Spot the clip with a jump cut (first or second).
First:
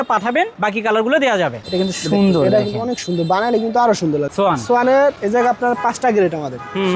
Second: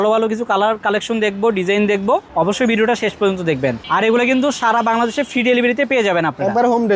first